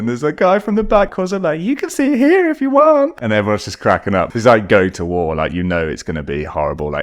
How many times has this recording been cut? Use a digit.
3